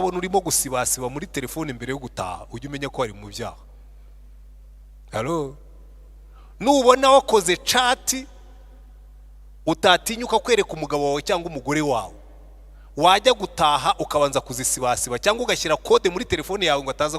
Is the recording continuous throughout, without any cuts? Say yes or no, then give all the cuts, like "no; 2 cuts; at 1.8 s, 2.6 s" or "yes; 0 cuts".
yes; 0 cuts